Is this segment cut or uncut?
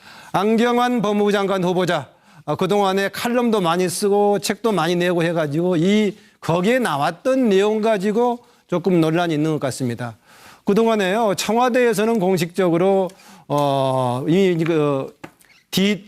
cut